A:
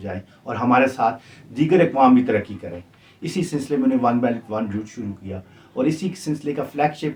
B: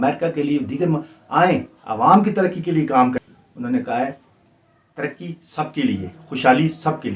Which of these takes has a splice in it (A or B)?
B